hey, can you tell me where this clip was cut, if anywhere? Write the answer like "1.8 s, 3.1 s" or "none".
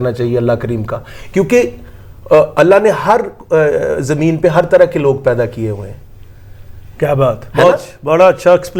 none